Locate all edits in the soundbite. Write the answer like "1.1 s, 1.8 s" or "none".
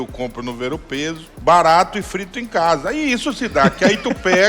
1.3 s